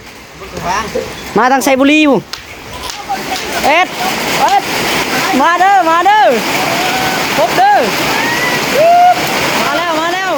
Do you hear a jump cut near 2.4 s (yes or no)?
no